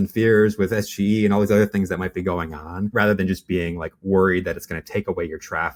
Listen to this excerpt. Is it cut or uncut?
uncut